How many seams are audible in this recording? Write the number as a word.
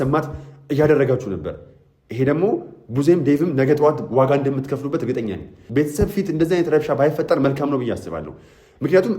one